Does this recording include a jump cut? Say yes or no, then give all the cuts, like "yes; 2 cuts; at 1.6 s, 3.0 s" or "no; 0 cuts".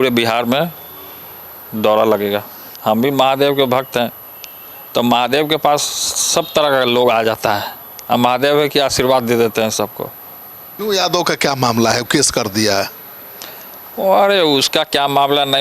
yes; 2 cuts; at 2.7 s, 10.7 s